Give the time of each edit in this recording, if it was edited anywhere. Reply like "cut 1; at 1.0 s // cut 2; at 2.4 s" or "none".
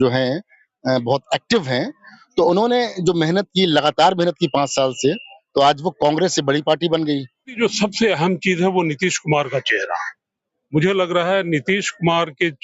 cut 1; at 7.6 s